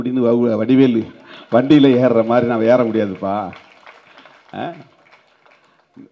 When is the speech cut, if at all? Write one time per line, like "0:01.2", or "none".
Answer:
none